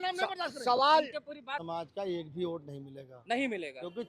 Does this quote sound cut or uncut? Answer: cut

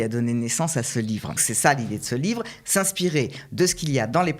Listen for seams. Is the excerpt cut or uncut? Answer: cut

